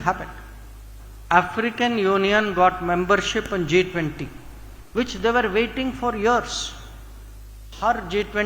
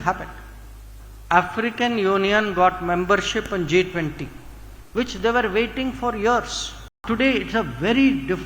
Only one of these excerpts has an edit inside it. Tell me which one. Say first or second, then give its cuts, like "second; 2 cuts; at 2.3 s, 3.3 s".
second; 1 cut; at 7.0 s